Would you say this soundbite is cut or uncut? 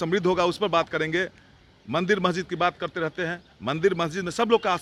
uncut